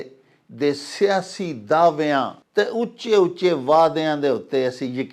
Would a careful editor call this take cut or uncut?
cut